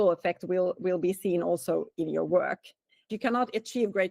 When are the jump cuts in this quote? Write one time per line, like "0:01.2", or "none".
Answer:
0:03.1